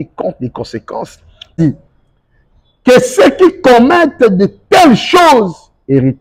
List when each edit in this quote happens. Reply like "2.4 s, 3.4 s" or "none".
1.6 s